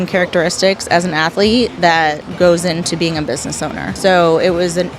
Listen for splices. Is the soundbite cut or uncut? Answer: cut